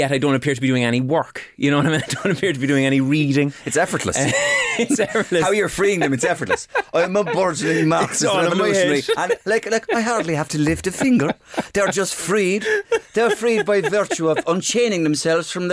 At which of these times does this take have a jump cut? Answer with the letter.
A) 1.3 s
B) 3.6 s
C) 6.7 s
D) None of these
D